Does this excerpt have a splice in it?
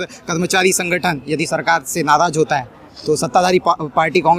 no; 0 cuts

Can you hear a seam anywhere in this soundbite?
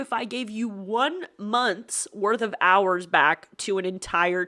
no; 0 cuts

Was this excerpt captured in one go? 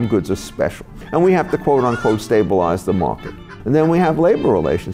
no; 2 cuts; at 1.0 s, 3.3 s

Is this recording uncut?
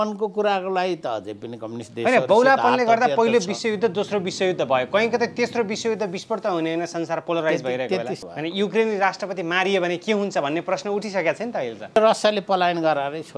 no; 2 cuts; at 8.2 s, 12.0 s

